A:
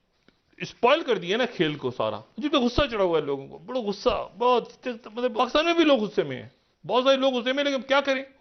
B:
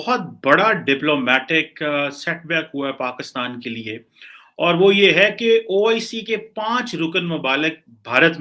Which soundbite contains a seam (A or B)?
A